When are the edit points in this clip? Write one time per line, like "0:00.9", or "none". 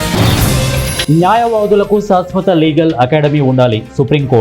0:01.0